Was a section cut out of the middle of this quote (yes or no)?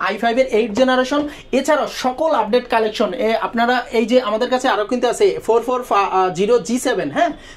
no